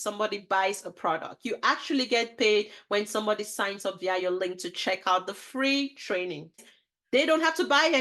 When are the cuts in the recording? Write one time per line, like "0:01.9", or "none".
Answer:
0:06.7